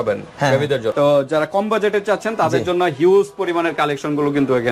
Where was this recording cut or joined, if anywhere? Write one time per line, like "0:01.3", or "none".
0:00.9